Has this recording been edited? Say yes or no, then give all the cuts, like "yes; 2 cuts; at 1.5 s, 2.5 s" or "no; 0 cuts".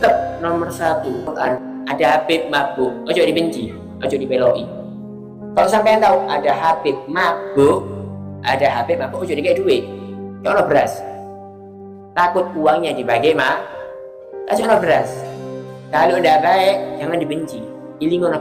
no; 0 cuts